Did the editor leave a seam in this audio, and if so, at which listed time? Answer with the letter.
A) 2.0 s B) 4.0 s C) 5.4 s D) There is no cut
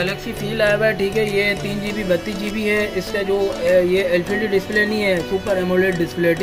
D